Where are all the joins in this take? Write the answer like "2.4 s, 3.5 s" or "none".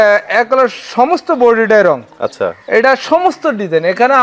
none